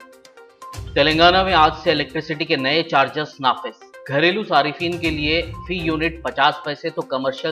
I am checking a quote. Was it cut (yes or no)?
no